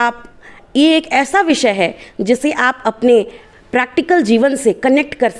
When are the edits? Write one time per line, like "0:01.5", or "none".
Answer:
none